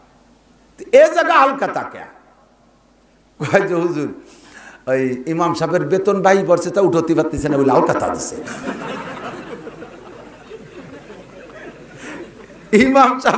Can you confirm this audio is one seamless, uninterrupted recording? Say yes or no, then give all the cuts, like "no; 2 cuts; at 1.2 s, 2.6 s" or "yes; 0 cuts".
yes; 0 cuts